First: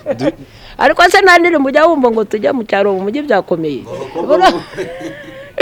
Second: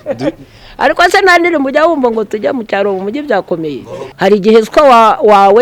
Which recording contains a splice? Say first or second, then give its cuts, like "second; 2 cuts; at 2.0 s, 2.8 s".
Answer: second; 1 cut; at 4.0 s